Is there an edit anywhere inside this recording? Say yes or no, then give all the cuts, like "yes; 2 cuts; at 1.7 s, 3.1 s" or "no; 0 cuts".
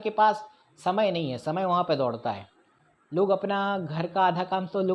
no; 0 cuts